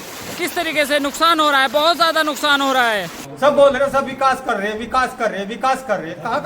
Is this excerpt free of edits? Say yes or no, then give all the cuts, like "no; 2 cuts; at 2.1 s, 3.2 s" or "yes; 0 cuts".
no; 1 cut; at 3.2 s